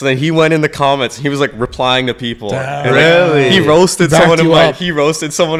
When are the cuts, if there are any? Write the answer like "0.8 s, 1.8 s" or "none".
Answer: none